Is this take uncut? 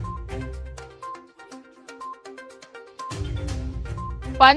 no; 1 cut; at 2.6 s

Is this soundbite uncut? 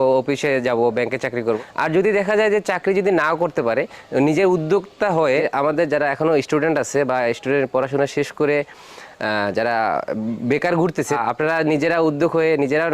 no; 3 cuts; at 1.5 s, 5.5 s, 11.2 s

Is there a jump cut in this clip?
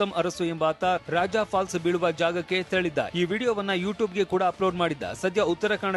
no; 0 cuts

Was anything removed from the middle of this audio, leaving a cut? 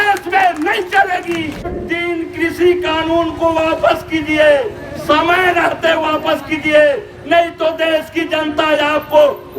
yes; 1 cut; at 1.7 s

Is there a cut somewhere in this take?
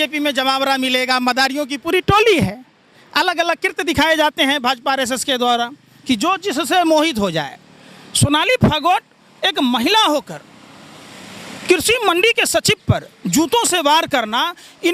no; 0 cuts

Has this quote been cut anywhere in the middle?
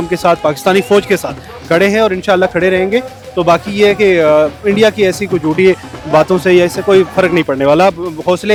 no; 0 cuts

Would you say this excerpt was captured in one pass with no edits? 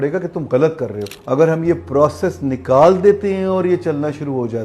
no; 1 cut; at 1.1 s

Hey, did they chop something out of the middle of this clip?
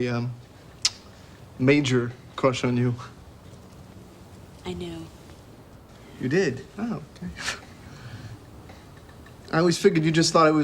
yes; 1 cut; at 2.9 s

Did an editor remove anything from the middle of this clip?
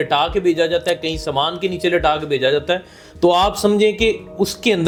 no; 0 cuts

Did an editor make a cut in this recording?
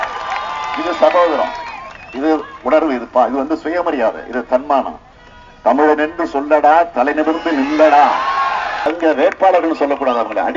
yes; 1 cut; at 8.9 s

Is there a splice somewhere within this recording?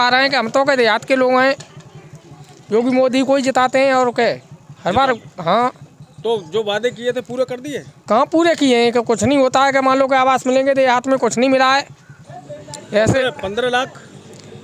no; 0 cuts

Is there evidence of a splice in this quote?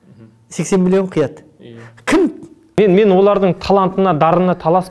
yes; 1 cut; at 2.8 s

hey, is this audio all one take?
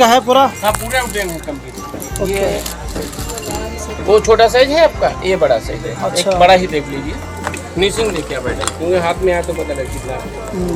yes; 0 cuts

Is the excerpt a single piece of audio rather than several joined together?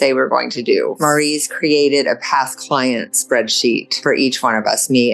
no; 2 cuts; at 0.9 s, 3.9 s

